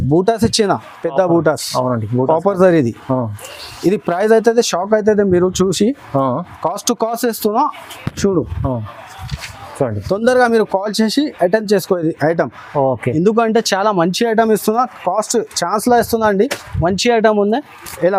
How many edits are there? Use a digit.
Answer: 0